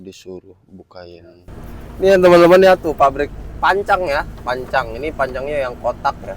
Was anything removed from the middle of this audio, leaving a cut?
yes; 1 cut; at 1.5 s

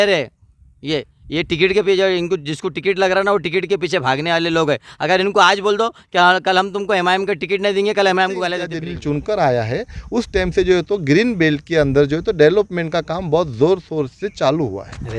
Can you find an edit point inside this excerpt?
yes; 1 cut; at 8.8 s

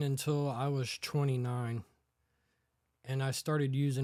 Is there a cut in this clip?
no; 0 cuts

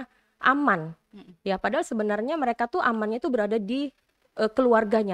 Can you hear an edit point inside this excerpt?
no; 0 cuts

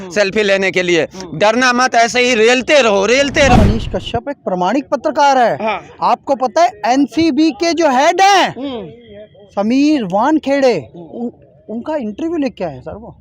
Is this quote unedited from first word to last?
no; 1 cut; at 3.6 s

